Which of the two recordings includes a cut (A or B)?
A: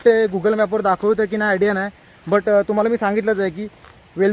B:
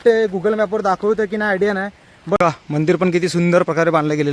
B